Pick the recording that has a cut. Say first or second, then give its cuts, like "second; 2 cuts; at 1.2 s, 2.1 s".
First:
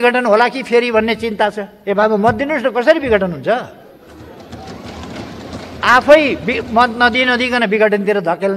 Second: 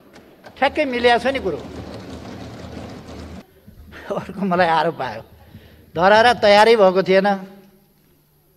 second; 1 cut; at 3.4 s